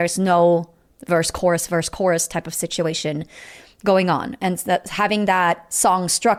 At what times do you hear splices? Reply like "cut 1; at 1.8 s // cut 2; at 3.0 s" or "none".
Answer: none